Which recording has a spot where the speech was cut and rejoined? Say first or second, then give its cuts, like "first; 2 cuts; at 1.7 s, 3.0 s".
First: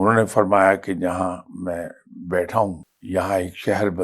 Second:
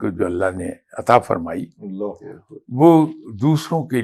first; 1 cut; at 2.9 s